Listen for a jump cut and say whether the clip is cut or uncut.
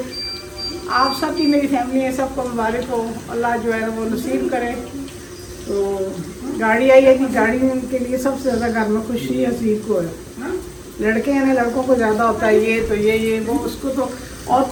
uncut